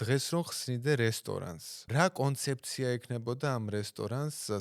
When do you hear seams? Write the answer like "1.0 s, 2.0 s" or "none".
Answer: 1.7 s